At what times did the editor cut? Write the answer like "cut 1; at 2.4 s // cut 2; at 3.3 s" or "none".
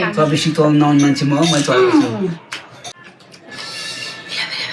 cut 1; at 3.0 s